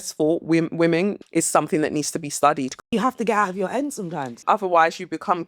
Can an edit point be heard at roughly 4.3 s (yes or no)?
yes